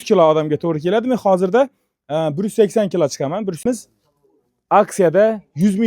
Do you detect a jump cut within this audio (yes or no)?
yes